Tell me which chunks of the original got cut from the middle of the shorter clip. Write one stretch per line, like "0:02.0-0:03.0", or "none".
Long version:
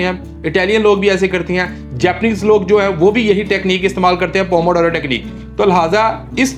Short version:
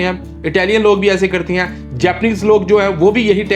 none